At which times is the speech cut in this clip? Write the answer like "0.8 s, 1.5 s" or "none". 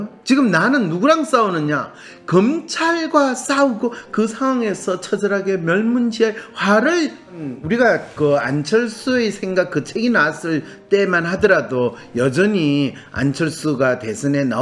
7.5 s